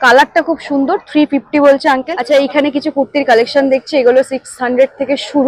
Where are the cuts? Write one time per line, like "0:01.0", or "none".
0:02.1